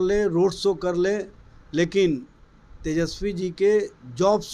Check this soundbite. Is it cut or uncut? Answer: uncut